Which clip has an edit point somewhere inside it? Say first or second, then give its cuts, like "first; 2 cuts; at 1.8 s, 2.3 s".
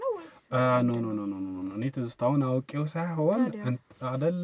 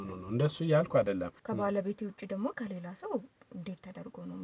second; 1 cut; at 1.4 s